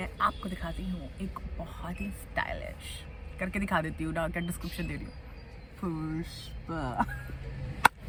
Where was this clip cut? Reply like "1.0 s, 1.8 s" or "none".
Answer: none

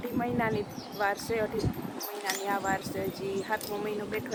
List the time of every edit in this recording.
none

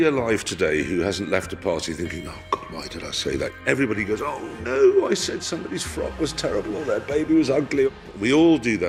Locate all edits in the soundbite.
none

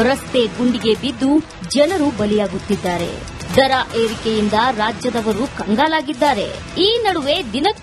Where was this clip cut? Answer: none

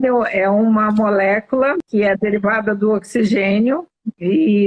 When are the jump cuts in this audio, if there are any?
1.8 s

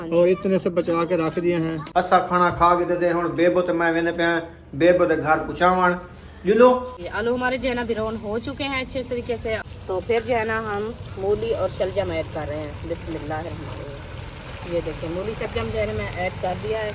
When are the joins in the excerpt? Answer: 1.8 s, 7.0 s, 9.7 s

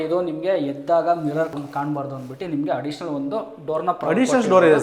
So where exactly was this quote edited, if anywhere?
1.5 s

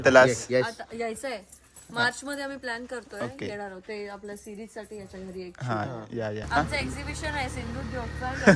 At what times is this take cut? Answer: 6.5 s

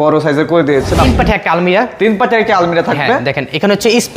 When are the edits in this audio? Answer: 1.1 s

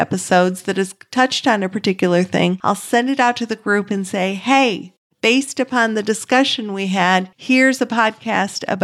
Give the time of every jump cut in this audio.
2.6 s, 7.3 s

